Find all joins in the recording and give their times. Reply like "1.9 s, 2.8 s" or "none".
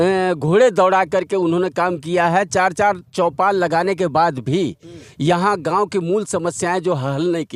none